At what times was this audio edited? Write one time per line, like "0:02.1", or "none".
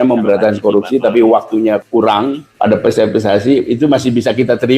0:01.9